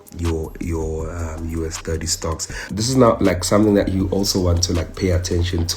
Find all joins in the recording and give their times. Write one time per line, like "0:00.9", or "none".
0:02.7